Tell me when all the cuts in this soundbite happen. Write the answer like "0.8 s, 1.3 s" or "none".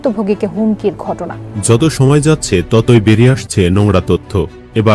1.7 s